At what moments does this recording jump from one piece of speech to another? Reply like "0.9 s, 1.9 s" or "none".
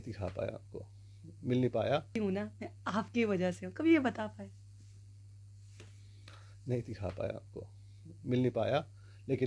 2.2 s